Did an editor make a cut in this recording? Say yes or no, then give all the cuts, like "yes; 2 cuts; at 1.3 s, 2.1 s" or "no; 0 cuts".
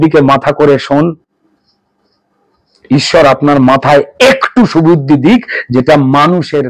no; 0 cuts